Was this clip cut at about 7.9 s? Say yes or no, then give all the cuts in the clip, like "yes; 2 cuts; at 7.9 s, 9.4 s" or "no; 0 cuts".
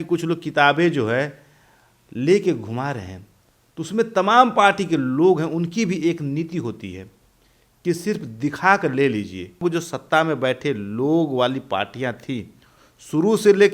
no; 1 cut; at 9.6 s